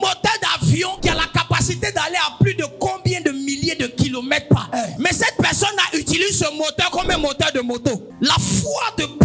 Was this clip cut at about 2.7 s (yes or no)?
no